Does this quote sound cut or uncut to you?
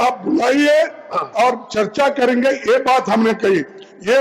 uncut